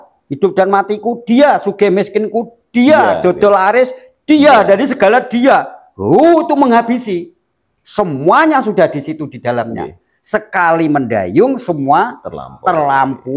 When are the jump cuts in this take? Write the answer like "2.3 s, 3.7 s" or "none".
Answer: none